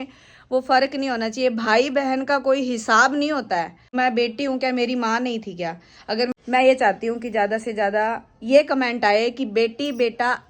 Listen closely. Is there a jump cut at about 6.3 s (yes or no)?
yes